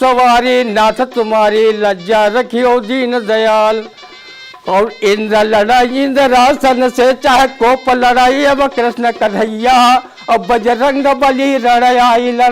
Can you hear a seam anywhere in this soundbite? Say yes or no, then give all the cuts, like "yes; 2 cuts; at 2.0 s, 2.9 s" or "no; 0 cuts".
yes; 1 cut; at 4.1 s